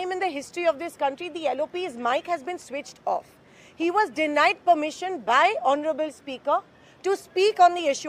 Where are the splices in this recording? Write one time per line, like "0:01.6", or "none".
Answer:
none